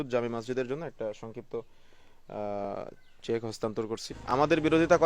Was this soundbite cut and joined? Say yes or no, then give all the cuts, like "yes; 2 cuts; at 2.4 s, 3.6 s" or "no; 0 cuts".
yes; 1 cut; at 4.1 s